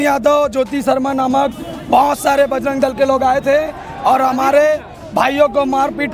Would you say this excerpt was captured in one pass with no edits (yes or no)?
yes